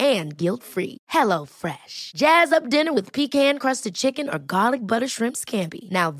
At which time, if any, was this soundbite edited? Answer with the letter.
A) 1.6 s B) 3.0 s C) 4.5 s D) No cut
D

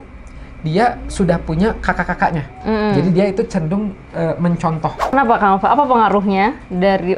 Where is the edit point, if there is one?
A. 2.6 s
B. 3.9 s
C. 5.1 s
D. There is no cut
C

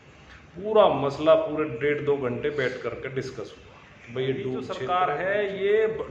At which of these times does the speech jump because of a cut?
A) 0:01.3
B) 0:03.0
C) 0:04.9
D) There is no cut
C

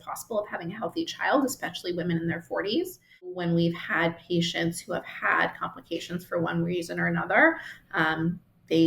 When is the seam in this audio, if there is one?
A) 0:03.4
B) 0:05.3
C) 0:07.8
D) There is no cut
A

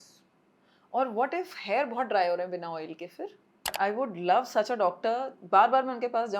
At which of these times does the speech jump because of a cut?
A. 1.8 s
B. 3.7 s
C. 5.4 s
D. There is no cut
B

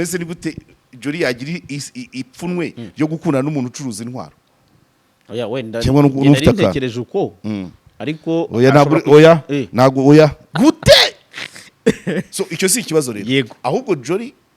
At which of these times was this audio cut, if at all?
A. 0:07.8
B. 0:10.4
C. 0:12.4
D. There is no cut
B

